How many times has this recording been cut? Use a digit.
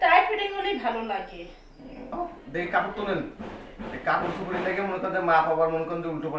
1